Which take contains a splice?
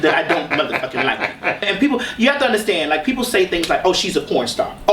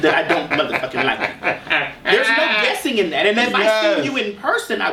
first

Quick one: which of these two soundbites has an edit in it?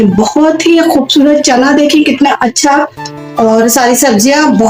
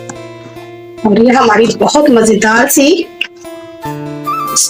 second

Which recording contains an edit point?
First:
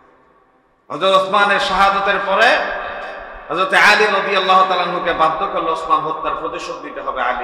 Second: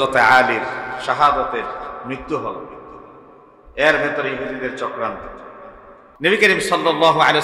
second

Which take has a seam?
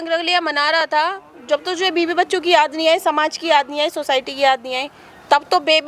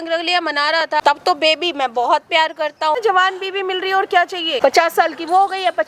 second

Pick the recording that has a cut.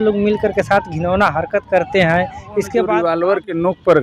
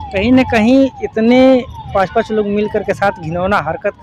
first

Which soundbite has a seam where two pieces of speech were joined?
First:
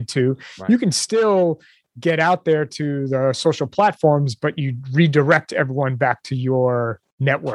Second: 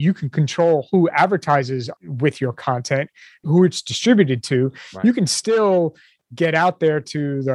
second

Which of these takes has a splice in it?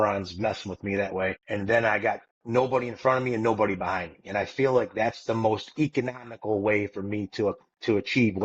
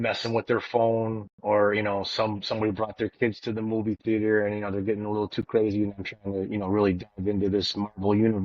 first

